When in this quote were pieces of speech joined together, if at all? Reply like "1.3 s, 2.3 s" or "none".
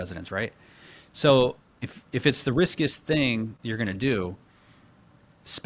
3.6 s